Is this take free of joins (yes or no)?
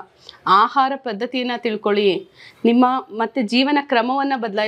yes